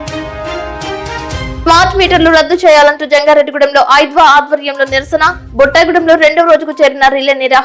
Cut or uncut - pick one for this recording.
uncut